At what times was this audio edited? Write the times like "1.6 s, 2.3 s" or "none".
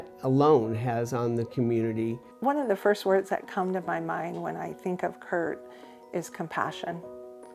2.3 s